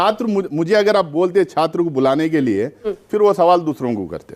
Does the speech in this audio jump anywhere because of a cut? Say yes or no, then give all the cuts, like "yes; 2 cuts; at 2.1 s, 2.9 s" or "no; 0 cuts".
no; 0 cuts